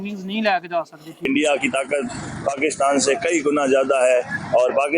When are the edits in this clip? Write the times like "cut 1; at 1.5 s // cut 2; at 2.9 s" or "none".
cut 1; at 1.3 s